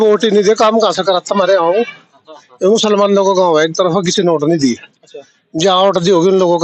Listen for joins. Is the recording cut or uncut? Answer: uncut